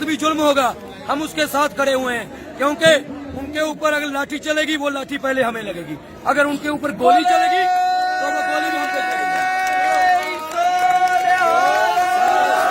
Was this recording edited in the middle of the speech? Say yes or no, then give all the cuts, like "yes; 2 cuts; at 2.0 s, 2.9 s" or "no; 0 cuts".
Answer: no; 0 cuts